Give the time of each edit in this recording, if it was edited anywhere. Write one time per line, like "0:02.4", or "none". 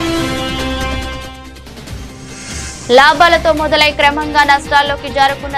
0:02.2

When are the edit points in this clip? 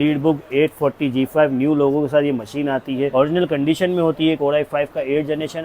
0:04.4

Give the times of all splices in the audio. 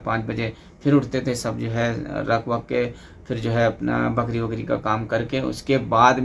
none

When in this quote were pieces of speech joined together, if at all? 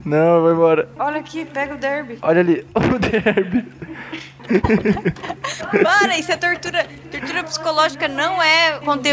0:04.4

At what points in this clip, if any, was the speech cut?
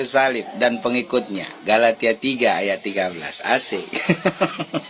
none

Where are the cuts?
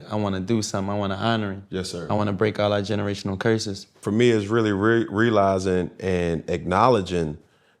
0:04.0

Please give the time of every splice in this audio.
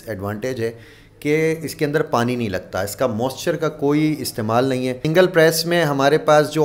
0:05.0

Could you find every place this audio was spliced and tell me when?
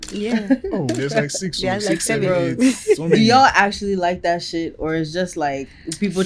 none

